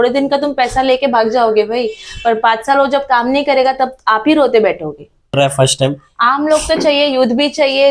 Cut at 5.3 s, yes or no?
yes